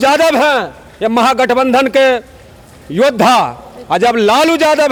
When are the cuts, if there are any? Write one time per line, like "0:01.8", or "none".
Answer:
none

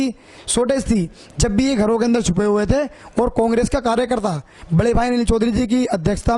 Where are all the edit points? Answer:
none

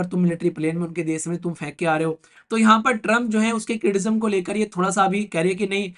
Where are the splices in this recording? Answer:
0:02.3

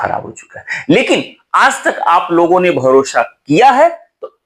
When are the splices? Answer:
none

